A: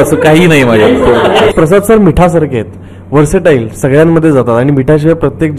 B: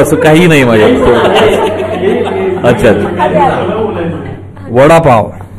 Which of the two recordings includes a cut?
A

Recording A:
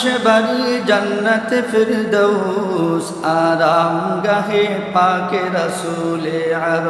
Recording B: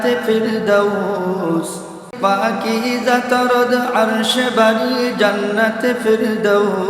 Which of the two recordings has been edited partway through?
B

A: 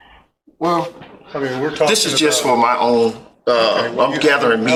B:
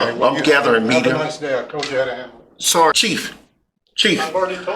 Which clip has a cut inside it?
B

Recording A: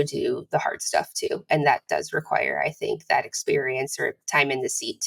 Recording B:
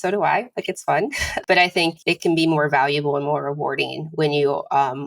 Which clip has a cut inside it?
B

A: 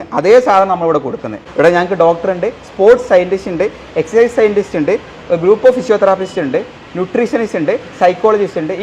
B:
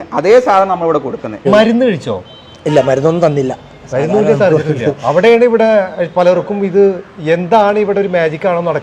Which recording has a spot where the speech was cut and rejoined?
B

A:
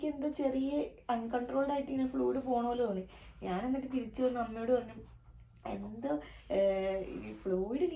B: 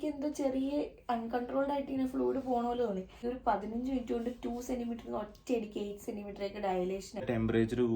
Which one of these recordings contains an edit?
B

